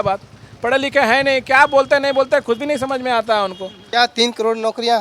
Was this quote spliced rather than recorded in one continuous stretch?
yes; 1 cut; at 3.7 s

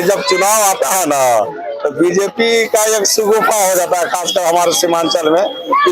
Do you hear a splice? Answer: no; 0 cuts

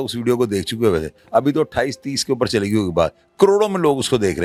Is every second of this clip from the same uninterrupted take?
yes; 0 cuts

